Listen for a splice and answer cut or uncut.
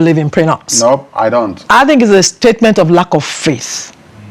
uncut